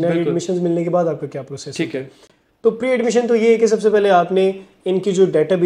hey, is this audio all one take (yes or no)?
yes